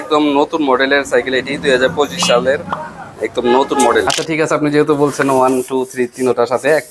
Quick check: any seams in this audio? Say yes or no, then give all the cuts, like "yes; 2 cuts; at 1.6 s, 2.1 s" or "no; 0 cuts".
yes; 1 cut; at 4.2 s